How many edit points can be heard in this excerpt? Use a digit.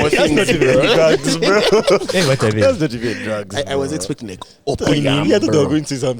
0